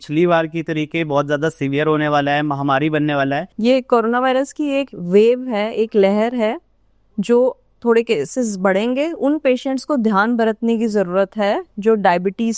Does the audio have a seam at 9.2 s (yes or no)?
yes